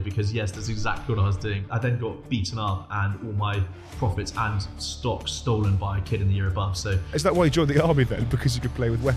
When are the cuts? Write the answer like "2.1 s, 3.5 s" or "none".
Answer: 1.3 s, 7.3 s